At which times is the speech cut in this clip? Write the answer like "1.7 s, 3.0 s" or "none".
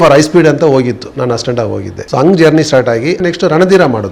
1.9 s, 3.2 s